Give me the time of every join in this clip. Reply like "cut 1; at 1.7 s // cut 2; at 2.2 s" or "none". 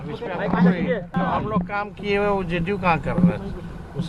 none